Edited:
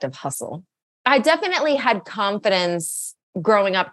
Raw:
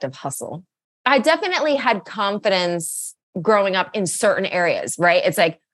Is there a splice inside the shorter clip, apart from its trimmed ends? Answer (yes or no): no